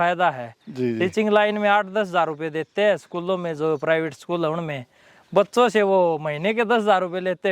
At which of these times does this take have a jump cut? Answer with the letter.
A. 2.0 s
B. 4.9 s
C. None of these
C